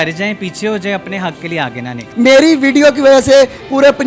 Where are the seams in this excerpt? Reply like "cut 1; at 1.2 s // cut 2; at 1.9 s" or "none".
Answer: cut 1; at 2.0 s